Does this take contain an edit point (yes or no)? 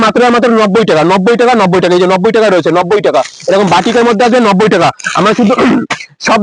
no